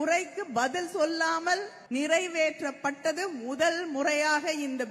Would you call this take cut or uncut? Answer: cut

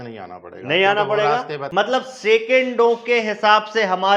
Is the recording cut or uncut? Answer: cut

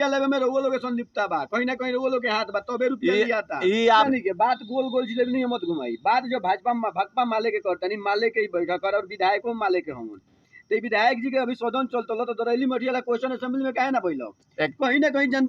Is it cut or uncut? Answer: cut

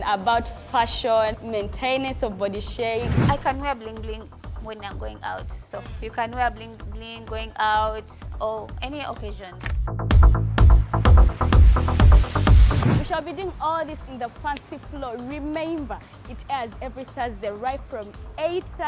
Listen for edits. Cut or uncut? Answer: cut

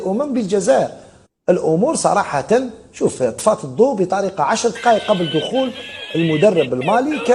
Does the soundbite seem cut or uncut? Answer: uncut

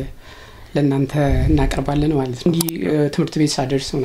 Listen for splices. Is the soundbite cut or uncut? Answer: cut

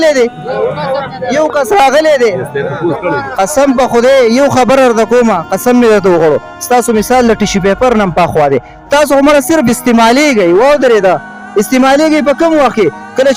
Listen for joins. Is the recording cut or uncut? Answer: uncut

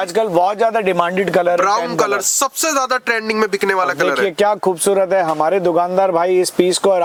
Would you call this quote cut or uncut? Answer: uncut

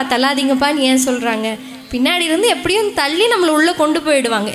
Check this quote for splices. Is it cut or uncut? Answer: uncut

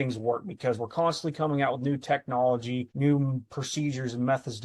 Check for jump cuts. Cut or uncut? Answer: cut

